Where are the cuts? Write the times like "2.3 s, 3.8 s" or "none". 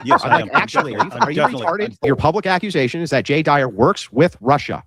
2.0 s